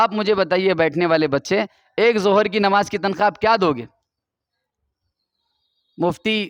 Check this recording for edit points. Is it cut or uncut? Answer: uncut